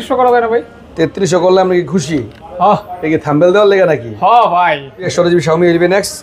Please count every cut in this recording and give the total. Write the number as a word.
one